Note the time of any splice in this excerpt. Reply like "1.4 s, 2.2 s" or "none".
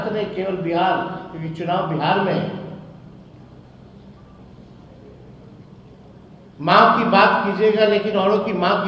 none